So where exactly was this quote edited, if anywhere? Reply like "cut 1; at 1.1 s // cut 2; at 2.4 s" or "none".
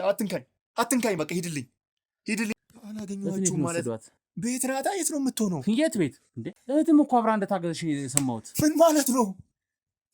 cut 1; at 2.6 s // cut 2; at 6.5 s